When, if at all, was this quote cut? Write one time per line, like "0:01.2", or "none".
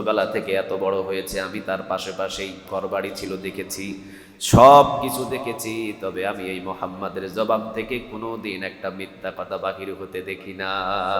none